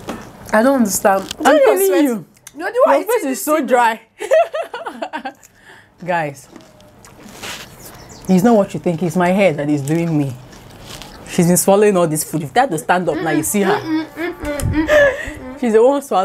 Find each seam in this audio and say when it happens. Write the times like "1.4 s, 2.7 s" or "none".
none